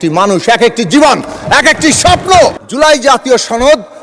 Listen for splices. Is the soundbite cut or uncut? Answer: cut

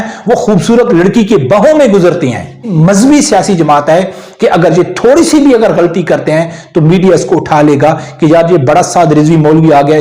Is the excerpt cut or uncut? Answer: cut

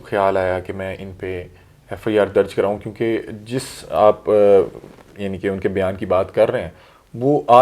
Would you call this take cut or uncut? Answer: uncut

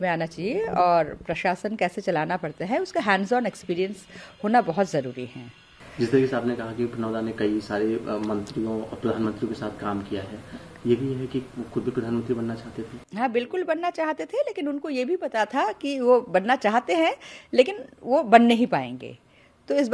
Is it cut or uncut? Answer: uncut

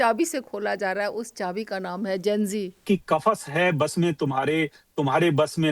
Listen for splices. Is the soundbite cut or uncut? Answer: cut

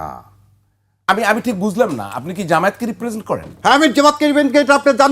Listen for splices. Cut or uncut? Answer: cut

